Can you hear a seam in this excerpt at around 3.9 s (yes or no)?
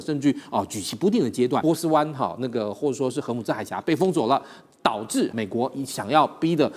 no